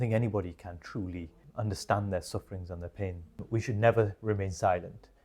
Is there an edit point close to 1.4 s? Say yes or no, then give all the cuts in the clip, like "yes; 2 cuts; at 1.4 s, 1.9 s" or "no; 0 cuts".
yes; 2 cuts; at 1.4 s, 3.4 s